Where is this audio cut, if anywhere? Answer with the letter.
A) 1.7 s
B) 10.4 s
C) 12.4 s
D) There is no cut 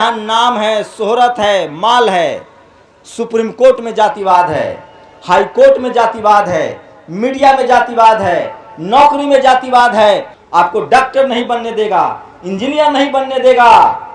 B